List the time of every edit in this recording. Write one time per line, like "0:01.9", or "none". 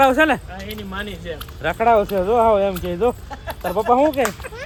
none